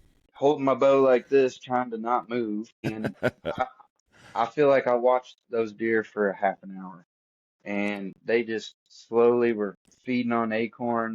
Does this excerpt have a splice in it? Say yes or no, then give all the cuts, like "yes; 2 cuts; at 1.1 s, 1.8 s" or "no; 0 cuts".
yes; 1 cut; at 2.8 s